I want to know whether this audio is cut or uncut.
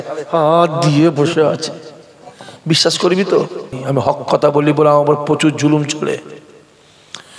cut